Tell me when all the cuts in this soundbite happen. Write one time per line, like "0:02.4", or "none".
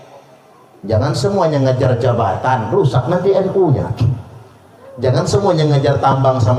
none